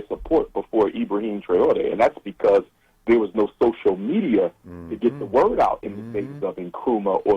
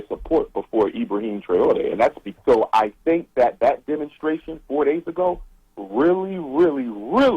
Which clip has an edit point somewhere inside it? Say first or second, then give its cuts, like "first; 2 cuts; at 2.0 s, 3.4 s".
second; 1 cut; at 2.3 s